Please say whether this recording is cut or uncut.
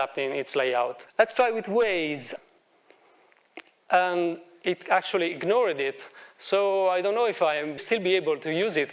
cut